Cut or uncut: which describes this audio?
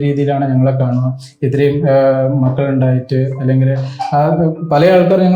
uncut